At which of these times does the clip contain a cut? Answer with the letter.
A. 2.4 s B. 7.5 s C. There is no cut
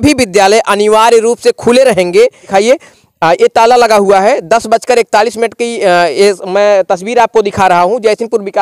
A